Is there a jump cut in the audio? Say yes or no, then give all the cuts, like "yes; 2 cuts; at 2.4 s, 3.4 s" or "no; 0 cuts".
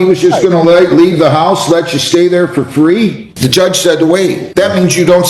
yes; 2 cuts; at 3.3 s, 4.4 s